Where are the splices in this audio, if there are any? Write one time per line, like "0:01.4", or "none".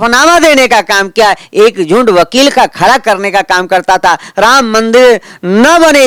none